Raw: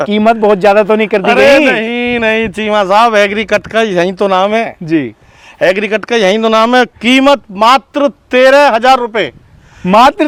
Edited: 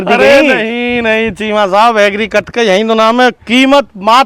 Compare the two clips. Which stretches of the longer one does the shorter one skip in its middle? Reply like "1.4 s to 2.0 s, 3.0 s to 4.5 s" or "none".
3.7 s to 6.0 s